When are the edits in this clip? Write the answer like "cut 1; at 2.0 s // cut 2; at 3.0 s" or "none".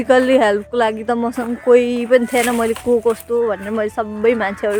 none